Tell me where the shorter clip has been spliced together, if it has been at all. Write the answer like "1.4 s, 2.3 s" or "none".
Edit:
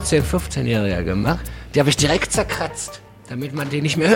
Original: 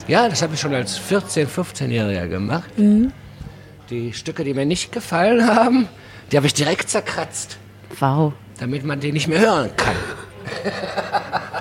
1.4 s, 3.2 s